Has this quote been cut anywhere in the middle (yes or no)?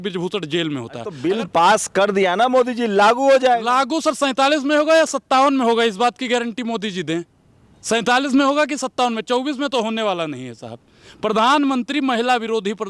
yes